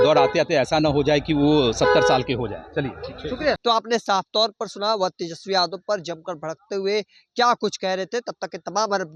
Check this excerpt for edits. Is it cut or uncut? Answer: uncut